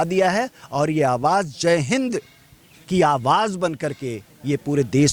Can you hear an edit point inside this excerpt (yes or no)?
no